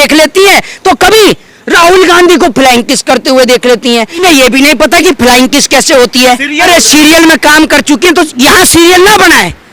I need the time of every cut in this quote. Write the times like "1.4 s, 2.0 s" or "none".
4.2 s, 6.7 s